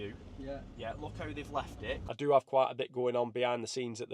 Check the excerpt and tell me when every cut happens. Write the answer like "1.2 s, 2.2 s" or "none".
2.1 s